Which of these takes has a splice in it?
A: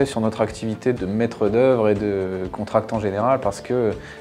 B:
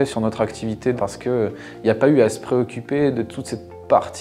B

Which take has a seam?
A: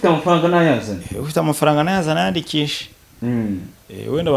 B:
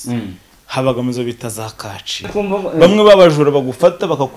B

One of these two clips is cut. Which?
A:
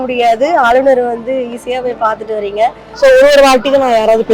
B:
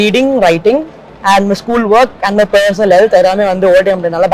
A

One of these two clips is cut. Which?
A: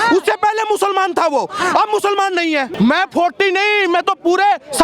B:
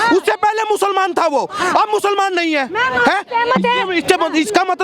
A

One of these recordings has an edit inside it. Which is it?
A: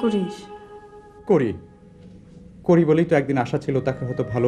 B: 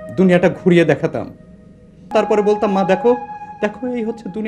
B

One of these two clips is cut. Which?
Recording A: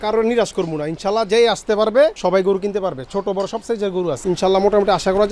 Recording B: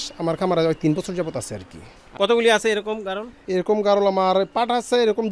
A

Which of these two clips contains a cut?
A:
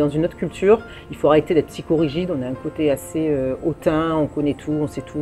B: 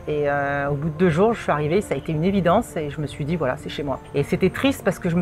B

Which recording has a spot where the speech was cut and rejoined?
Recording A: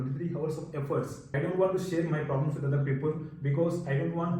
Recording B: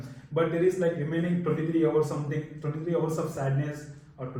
A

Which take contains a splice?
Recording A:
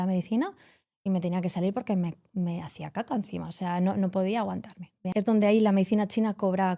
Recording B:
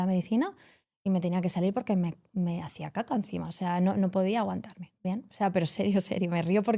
A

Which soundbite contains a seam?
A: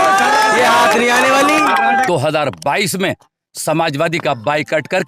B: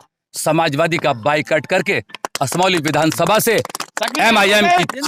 A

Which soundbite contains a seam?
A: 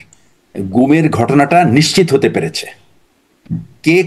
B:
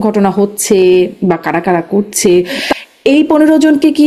B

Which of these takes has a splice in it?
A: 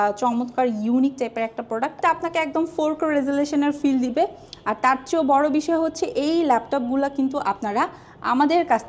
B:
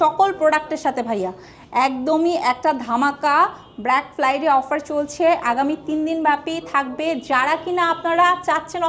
A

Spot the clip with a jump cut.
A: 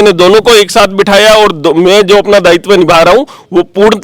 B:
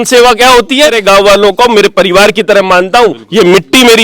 B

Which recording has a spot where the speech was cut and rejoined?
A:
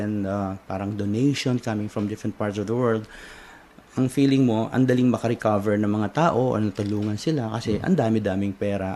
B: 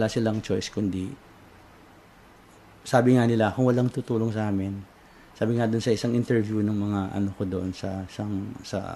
A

